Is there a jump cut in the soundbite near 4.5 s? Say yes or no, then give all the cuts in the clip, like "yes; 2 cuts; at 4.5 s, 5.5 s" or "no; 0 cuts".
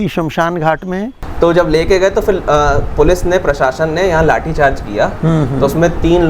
no; 1 cut; at 1.2 s